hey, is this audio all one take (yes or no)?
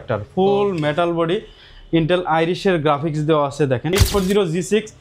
no